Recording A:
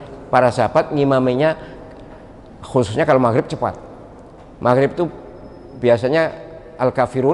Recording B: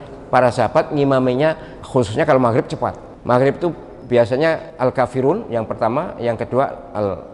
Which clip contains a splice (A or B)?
B